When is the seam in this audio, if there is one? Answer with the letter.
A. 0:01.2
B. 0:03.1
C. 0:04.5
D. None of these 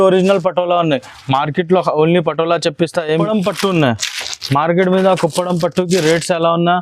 B